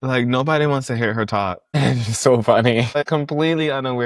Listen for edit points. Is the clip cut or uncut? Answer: cut